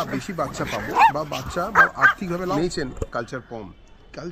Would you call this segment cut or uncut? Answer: cut